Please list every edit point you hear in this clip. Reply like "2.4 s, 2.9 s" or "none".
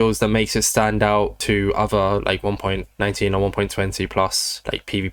none